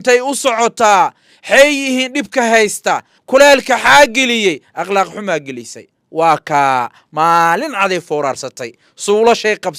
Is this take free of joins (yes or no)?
no